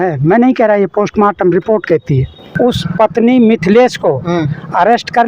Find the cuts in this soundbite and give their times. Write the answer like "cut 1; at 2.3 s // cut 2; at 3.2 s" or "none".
cut 1; at 2.4 s